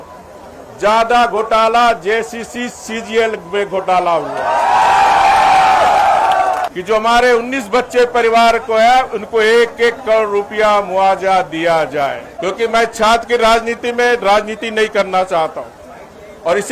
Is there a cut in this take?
yes; 2 cuts; at 6.7 s, 12.3 s

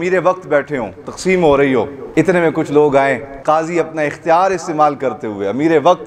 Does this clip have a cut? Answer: yes; 3 cuts; at 1.0 s, 2.0 s, 3.4 s

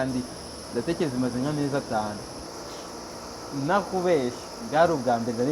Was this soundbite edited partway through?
yes; 1 cut; at 2.4 s

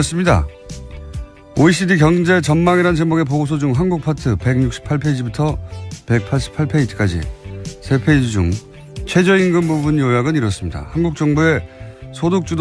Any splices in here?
yes; 1 cut; at 6.5 s

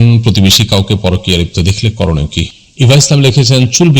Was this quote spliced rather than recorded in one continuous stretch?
yes; 1 cut; at 2.5 s

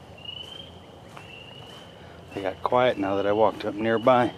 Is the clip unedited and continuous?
yes; 0 cuts

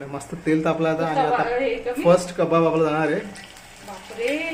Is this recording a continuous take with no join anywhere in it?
yes; 0 cuts

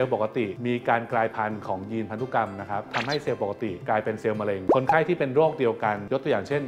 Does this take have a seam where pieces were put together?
yes; 2 cuts; at 2.9 s, 4.7 s

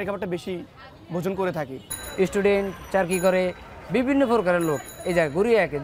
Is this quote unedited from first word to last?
yes; 0 cuts

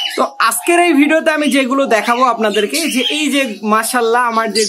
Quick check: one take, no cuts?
yes; 0 cuts

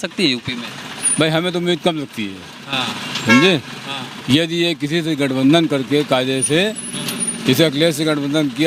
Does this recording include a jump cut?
no; 0 cuts

